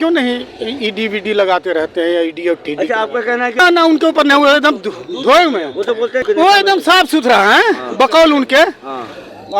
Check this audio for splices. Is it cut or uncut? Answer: cut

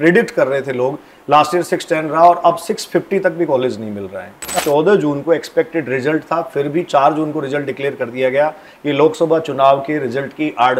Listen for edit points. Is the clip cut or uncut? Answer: cut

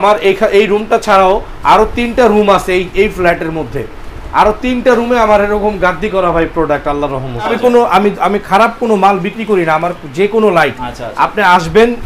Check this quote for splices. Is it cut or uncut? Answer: cut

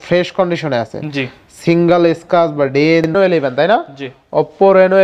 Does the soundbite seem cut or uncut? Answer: cut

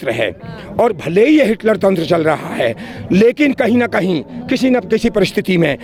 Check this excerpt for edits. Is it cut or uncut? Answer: uncut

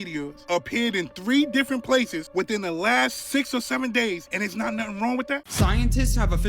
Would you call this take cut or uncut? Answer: cut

